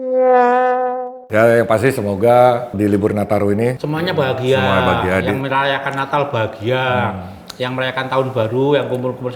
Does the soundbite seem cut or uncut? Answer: cut